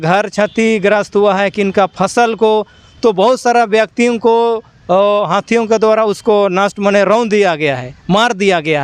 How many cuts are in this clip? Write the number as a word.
zero